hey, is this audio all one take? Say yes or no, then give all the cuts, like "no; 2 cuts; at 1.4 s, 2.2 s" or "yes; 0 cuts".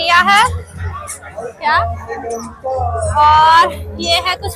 yes; 0 cuts